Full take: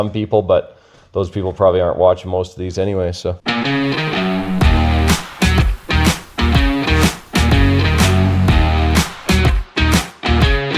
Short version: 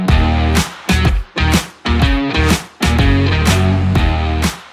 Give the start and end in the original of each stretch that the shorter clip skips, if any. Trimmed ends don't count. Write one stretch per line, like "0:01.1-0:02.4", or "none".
none